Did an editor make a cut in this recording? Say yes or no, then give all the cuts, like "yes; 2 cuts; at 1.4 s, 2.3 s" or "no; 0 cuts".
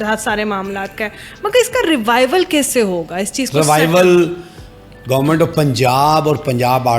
no; 0 cuts